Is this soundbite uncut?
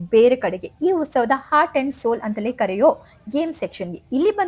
yes; 0 cuts

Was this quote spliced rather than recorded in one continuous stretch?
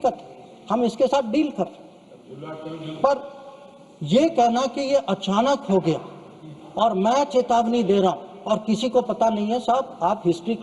no; 0 cuts

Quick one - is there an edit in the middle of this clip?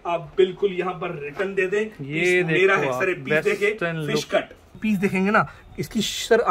yes; 1 cut; at 4.6 s

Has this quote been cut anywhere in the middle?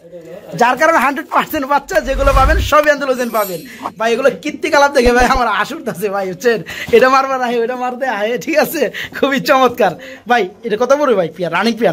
no; 0 cuts

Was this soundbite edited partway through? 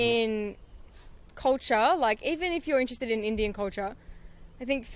no; 0 cuts

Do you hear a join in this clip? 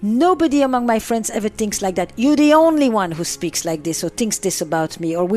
no; 0 cuts

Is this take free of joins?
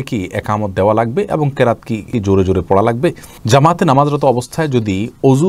no; 2 cuts; at 2.1 s, 3.3 s

